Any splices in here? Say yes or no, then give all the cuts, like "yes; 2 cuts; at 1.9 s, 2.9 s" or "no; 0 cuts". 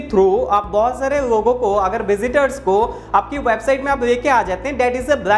no; 0 cuts